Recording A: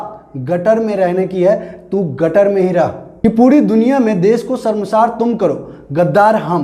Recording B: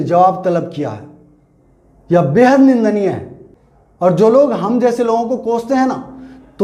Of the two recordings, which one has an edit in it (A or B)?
A